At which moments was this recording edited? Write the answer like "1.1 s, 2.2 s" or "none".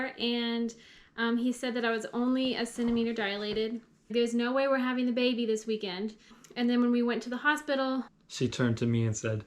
4.1 s, 6.4 s, 8.1 s